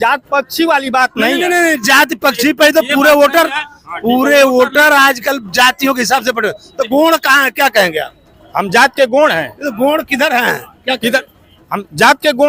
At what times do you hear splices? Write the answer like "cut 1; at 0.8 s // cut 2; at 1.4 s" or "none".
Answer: none